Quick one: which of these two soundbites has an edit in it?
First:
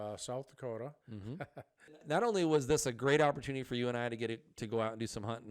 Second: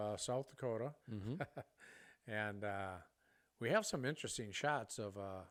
first; 1 cut; at 2.0 s

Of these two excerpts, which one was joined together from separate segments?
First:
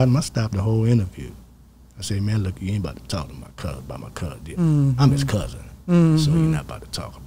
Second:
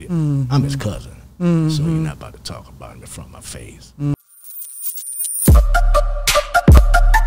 second; 1 cut; at 4.1 s

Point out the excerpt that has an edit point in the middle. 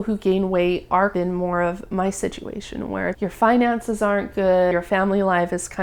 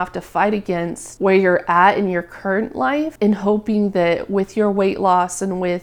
first; 3 cuts; at 1.1 s, 3.2 s, 4.7 s

